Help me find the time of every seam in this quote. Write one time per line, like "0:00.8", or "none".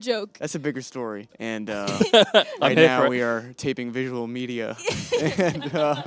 0:01.3